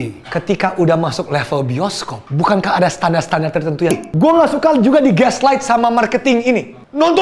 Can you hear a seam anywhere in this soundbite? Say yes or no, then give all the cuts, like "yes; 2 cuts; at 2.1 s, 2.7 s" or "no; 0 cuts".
yes; 1 cut; at 3.9 s